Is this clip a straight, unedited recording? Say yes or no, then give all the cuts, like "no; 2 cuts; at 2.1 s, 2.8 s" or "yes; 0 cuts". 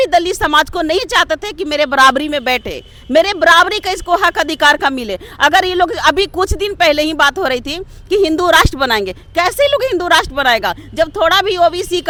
yes; 0 cuts